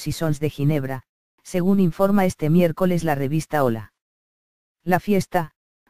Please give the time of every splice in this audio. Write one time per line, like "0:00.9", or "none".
0:01.4